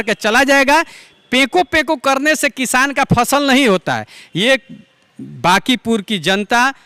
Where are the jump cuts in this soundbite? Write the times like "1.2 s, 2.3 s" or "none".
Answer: none